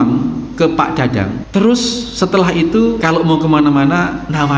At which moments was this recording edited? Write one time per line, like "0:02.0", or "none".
0:01.4
0:03.0